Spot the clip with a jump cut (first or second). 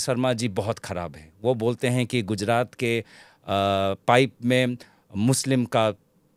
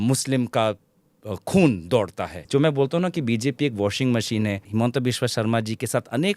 second